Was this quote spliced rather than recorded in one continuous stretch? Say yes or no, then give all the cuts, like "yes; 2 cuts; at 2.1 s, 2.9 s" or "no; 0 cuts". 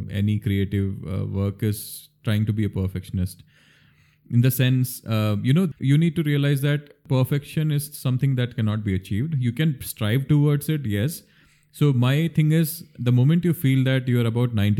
yes; 2 cuts; at 5.7 s, 7.0 s